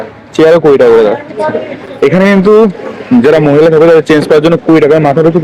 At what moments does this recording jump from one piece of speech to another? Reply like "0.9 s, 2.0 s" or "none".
none

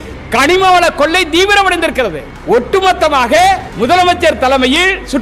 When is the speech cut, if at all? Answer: 2.3 s, 3.7 s

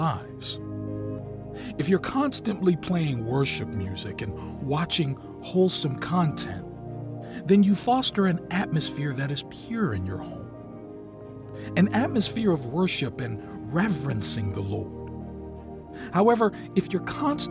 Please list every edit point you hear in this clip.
14.9 s, 16.1 s

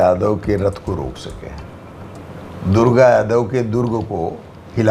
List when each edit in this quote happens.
none

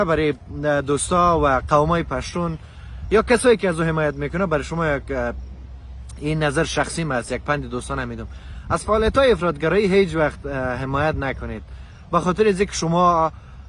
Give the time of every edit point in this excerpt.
none

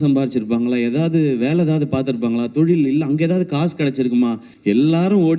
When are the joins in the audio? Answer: 4.5 s

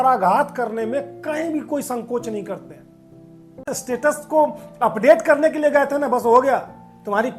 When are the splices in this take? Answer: 3.7 s

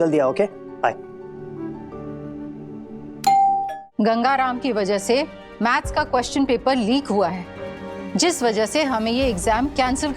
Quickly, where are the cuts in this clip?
3.8 s

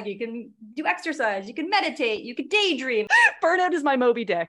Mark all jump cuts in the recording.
3.1 s

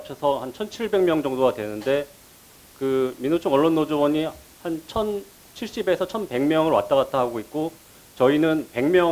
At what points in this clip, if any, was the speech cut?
none

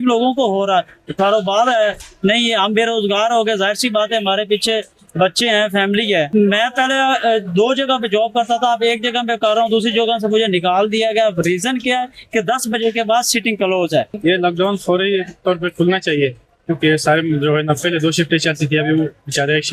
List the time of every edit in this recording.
6.3 s, 14.1 s

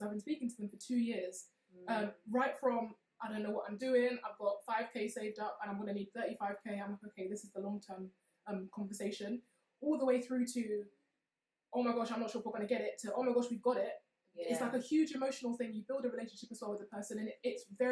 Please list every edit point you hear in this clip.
none

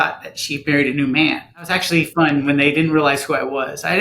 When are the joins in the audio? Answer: 1.8 s

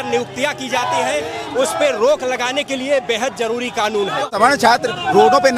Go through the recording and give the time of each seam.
4.3 s

